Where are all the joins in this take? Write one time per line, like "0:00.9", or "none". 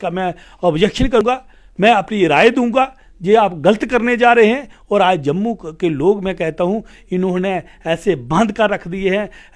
0:01.2